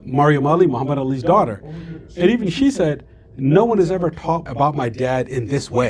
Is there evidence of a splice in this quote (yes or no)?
yes